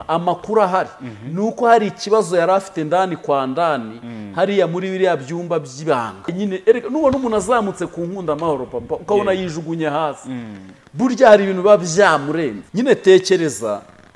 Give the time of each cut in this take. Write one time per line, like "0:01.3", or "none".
0:06.3
0:12.6